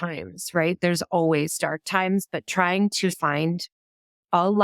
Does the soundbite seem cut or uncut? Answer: cut